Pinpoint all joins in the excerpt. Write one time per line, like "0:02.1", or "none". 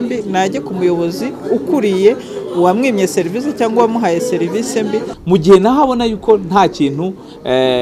0:05.1